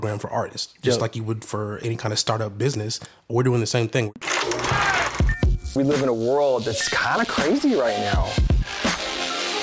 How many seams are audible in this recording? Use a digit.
1